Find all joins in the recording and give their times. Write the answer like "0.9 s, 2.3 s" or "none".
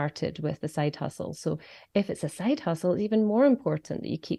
none